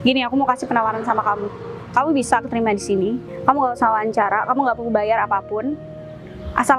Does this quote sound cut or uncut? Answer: uncut